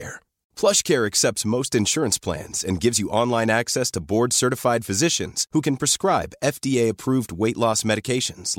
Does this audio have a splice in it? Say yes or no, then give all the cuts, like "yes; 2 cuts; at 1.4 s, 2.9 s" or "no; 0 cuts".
no; 0 cuts